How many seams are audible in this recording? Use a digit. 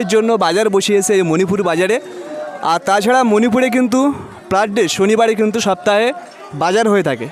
0